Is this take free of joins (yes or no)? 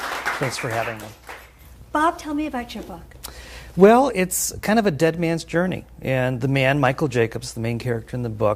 yes